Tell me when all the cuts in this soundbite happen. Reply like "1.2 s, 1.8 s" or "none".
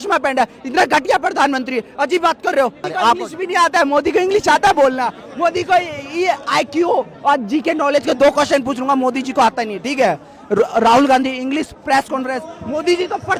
2.8 s